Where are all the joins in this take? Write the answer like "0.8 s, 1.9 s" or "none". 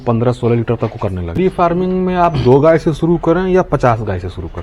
1.4 s